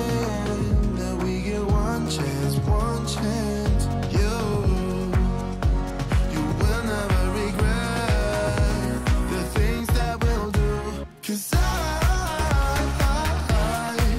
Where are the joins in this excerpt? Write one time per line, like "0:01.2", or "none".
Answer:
none